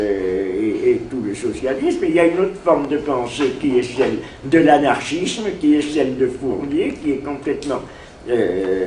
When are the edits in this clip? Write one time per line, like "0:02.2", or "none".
0:02.8